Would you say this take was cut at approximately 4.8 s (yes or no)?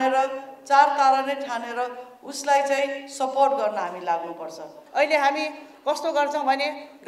yes